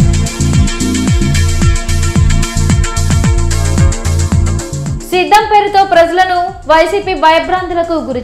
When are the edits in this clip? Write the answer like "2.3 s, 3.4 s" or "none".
4.8 s

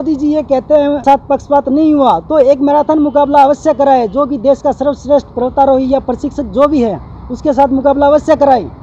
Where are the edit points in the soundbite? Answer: 1.0 s

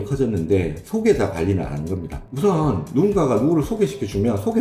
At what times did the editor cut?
2.2 s

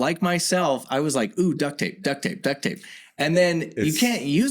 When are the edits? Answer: none

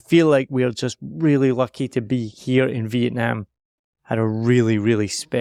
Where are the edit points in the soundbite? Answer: none

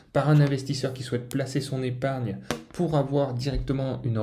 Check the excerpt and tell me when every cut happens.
none

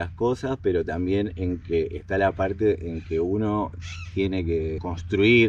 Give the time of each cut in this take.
none

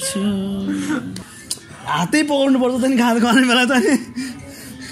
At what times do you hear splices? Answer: 1.2 s

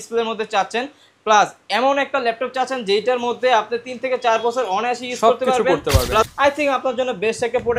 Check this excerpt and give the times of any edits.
6.3 s

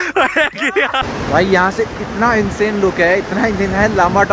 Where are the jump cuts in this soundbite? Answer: 1.2 s

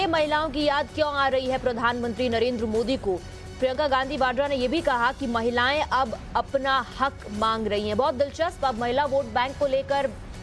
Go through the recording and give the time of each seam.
9.3 s

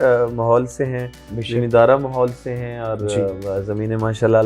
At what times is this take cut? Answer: none

